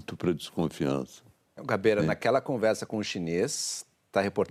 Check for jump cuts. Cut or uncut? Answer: uncut